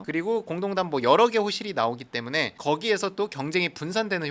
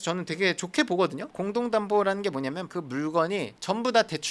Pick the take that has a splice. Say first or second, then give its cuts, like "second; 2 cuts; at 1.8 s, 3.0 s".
second; 2 cuts; at 1.2 s, 2.7 s